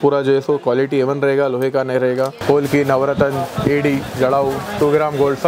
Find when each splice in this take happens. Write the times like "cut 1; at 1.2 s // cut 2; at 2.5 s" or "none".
cut 1; at 2.4 s